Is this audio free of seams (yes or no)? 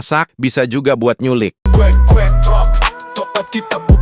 no